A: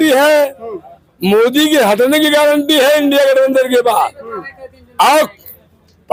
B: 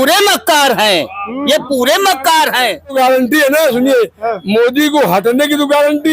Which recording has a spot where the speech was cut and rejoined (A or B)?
B